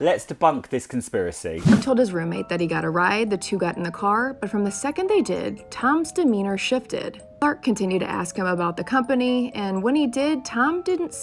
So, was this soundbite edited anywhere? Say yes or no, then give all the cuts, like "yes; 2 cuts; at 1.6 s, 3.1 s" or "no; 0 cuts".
yes; 1 cut; at 1.7 s